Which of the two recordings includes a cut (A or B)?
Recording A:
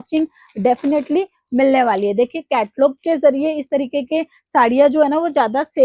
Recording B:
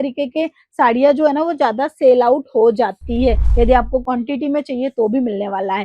B